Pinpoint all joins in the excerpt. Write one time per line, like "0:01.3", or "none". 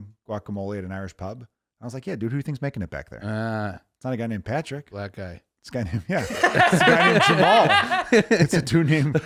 none